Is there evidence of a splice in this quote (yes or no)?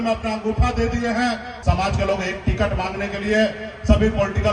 yes